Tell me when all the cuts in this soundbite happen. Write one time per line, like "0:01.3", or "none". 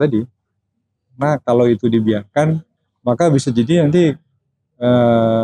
none